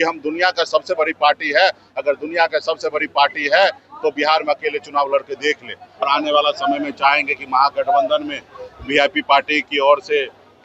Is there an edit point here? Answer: yes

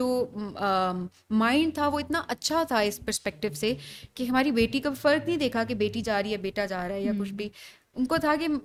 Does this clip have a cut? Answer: no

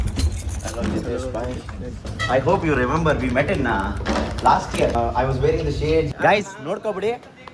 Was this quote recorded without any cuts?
no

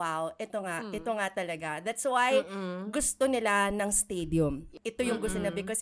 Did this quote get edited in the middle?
yes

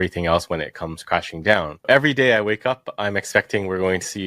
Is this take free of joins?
no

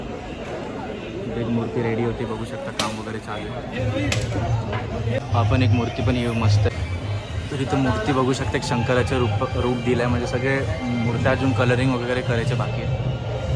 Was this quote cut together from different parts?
yes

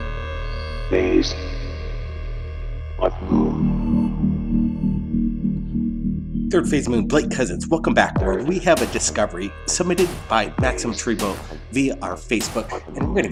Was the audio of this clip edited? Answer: no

